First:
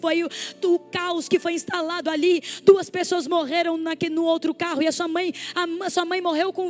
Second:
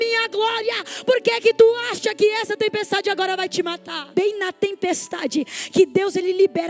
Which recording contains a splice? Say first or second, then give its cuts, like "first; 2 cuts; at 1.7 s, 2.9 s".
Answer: second; 1 cut; at 4.1 s